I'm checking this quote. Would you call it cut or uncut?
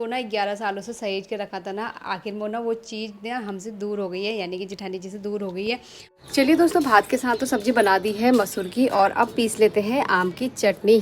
cut